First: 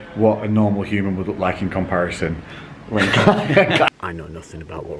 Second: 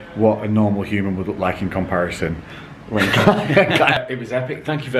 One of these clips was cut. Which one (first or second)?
first